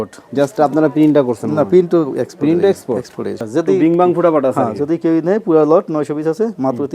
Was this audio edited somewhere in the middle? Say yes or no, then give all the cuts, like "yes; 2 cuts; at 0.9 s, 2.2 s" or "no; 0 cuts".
yes; 1 cut; at 3.4 s